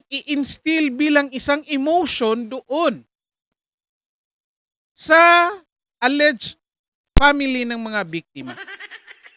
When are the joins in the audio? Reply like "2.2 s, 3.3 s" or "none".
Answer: none